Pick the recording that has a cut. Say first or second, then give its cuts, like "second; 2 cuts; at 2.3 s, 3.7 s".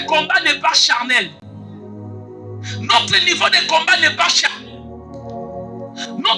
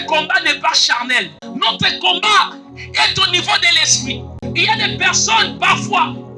second; 2 cuts; at 1.4 s, 4.4 s